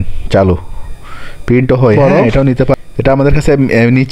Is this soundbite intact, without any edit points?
no; 1 cut; at 2.7 s

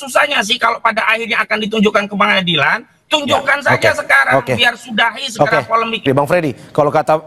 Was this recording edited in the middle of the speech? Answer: yes; 1 cut; at 6.1 s

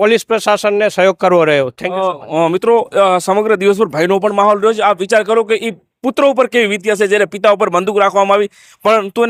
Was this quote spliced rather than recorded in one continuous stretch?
no; 0 cuts

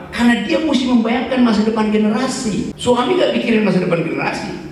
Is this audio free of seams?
no; 1 cut; at 2.7 s

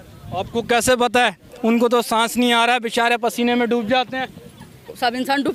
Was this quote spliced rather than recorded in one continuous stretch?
no; 0 cuts

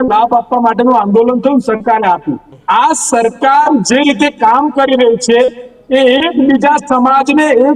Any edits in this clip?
yes; 1 cut; at 2.5 s

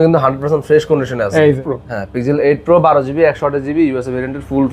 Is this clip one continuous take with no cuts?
no; 1 cut; at 1.7 s

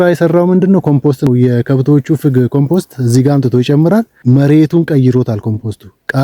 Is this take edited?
yes; 2 cuts; at 1.3 s, 4.1 s

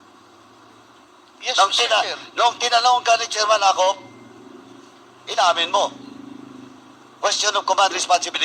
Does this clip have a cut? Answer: no; 0 cuts

